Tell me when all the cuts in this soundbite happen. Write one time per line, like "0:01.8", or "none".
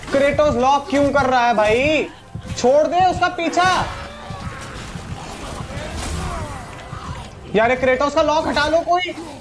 none